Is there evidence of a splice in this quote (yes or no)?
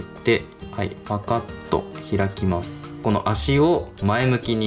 yes